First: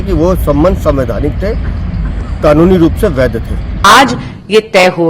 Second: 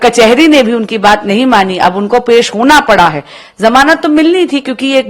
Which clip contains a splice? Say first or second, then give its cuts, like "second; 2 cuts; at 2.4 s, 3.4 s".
first; 1 cut; at 3.7 s